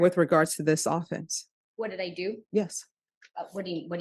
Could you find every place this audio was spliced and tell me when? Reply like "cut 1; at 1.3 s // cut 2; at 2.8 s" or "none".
none